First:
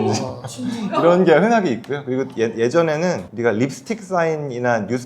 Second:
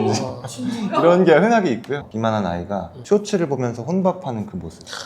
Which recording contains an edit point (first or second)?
second